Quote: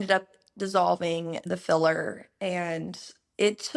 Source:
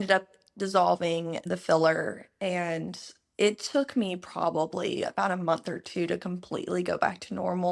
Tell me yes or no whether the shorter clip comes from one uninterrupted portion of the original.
yes